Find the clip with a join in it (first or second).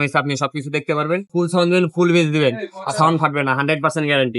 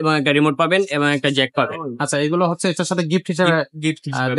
first